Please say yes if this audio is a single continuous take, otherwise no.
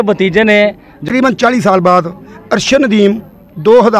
no